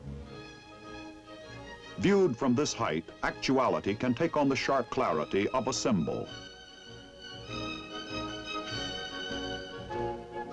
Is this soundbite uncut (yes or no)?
yes